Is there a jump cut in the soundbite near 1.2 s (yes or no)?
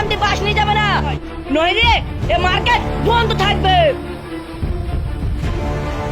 yes